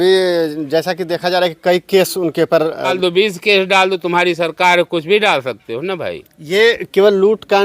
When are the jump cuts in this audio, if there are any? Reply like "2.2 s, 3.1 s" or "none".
2.9 s